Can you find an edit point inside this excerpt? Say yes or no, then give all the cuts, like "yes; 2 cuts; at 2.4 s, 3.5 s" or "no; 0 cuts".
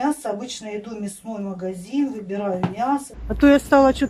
yes; 1 cut; at 3.1 s